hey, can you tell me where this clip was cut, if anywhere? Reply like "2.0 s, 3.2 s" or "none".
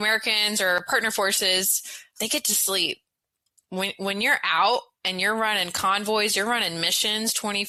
none